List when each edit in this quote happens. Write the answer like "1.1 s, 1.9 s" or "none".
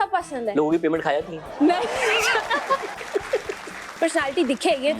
3.8 s